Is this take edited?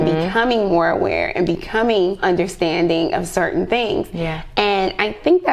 yes; 1 cut; at 2.2 s

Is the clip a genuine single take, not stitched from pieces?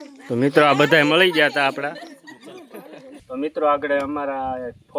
no; 1 cut; at 3.2 s

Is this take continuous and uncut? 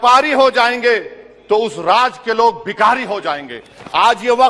yes; 0 cuts

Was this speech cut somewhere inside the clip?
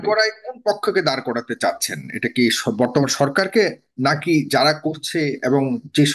no; 0 cuts

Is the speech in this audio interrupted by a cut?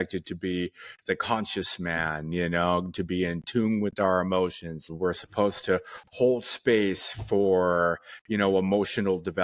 yes; 1 cut; at 4.9 s

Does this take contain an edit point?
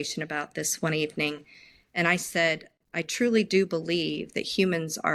no; 0 cuts

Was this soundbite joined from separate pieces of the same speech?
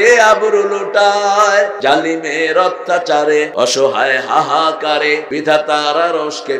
yes; 3 cuts; at 1.8 s, 3.5 s, 5.3 s

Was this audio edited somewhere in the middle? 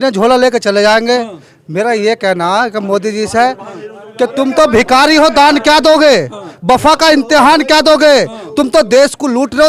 no; 0 cuts

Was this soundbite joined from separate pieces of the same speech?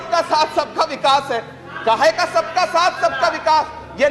no; 0 cuts

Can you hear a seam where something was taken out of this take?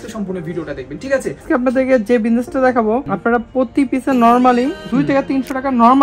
yes; 2 cuts; at 1.4 s, 3.1 s

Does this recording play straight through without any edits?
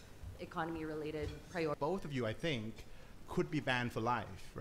no; 1 cut; at 1.8 s

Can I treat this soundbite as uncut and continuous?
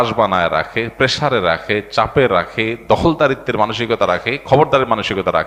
yes; 0 cuts

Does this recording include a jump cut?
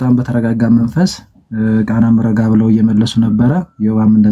no; 0 cuts

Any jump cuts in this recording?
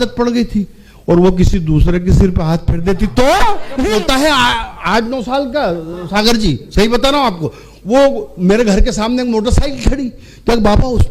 yes; 1 cut; at 3.8 s

